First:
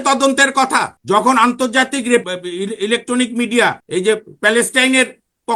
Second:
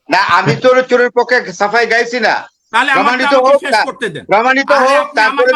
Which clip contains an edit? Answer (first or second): first